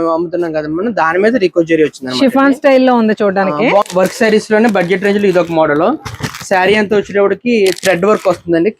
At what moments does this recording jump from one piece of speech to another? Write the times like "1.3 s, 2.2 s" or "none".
3.8 s